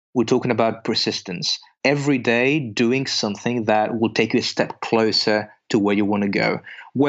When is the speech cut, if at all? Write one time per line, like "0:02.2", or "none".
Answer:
0:01.7
0:03.9